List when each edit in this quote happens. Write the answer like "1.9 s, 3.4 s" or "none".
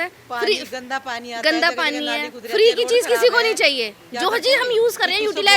none